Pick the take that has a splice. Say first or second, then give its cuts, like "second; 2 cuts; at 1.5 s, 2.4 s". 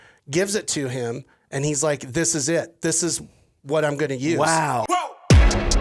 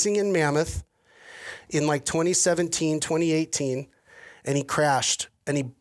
first; 1 cut; at 4.8 s